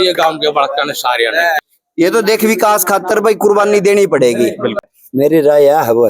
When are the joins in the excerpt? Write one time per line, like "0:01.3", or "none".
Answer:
0:01.6
0:04.7